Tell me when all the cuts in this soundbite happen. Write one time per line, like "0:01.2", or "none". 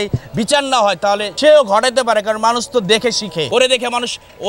0:01.3
0:03.5